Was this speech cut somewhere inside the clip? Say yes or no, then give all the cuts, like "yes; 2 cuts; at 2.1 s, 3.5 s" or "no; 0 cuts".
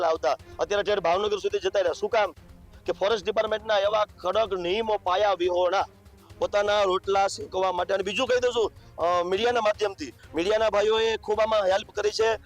no; 0 cuts